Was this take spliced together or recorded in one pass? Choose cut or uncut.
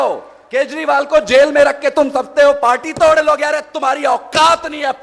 uncut